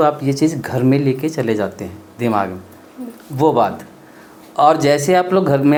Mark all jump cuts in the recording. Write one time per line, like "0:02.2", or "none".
none